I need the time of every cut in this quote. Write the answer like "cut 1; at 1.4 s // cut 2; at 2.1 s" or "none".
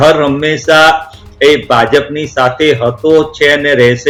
none